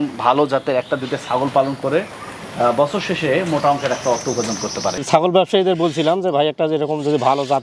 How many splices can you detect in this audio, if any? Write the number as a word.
one